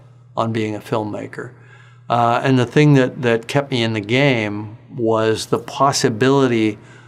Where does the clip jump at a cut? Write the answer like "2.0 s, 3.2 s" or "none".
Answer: none